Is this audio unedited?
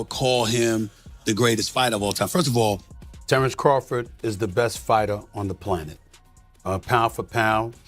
no; 1 cut; at 2.9 s

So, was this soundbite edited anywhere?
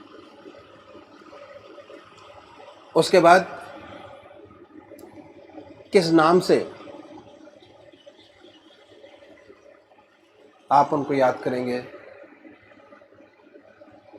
no; 0 cuts

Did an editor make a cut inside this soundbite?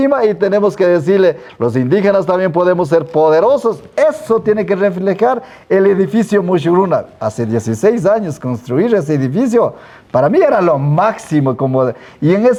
no; 0 cuts

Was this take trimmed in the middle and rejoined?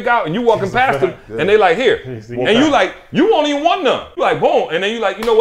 yes; 1 cut; at 4.2 s

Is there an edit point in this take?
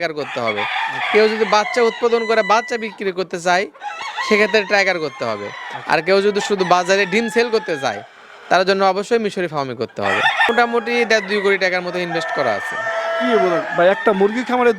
yes; 1 cut; at 10.5 s

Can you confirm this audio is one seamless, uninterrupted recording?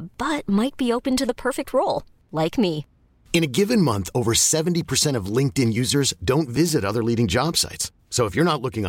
yes; 0 cuts

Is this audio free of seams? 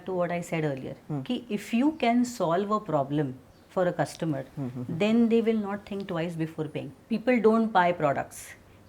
no; 1 cut; at 7.0 s

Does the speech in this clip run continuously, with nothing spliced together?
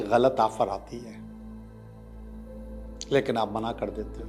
yes; 0 cuts

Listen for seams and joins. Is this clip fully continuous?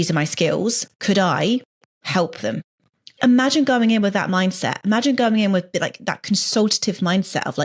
no; 1 cut; at 3.2 s

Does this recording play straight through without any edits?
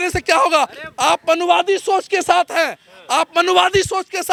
yes; 0 cuts

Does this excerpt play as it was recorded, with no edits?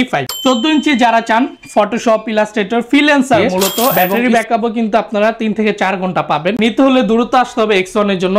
no; 2 cuts; at 4.1 s, 6.6 s

